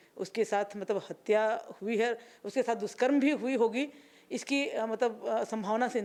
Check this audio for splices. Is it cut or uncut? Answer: uncut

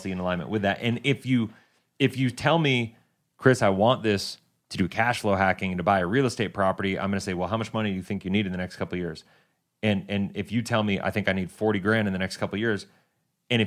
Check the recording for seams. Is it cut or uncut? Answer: uncut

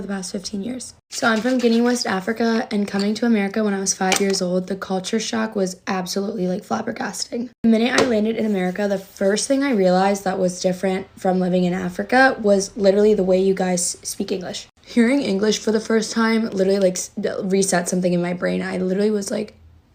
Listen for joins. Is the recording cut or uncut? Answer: uncut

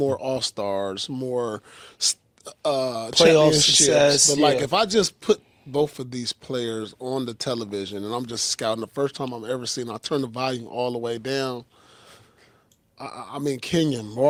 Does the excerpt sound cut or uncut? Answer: uncut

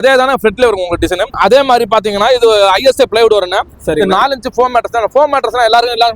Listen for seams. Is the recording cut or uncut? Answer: cut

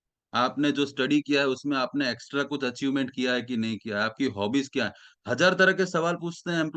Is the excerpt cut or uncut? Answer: uncut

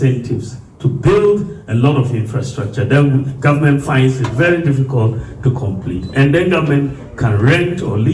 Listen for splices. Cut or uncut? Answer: uncut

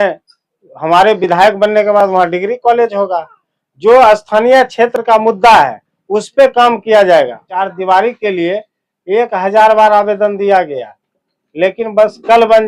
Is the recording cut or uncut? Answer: cut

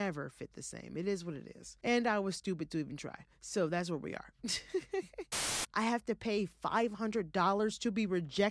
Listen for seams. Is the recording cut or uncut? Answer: cut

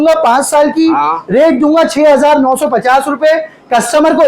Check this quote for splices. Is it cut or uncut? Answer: uncut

